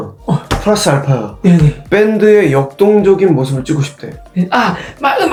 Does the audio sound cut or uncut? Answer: uncut